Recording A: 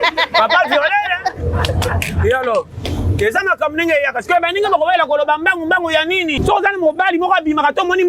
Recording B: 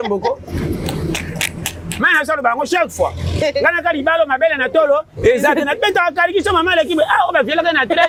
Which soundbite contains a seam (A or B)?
A